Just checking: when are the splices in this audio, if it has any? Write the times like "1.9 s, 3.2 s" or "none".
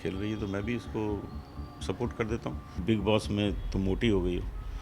2.8 s